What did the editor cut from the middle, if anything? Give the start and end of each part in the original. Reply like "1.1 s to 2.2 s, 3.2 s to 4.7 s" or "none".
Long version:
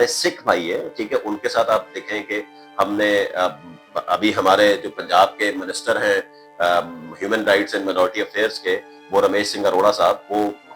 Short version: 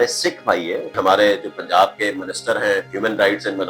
0.9 s to 4.3 s, 6.3 s to 7.2 s